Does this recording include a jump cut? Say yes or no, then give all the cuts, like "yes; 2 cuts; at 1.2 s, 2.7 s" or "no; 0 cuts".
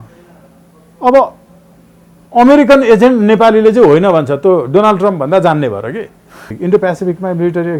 yes; 1 cut; at 6.5 s